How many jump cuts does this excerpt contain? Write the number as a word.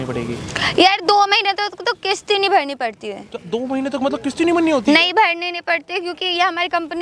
zero